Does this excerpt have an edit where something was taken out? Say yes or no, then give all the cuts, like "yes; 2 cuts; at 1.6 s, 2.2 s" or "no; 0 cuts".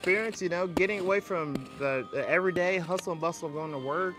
no; 0 cuts